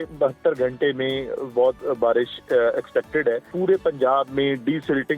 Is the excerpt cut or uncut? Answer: cut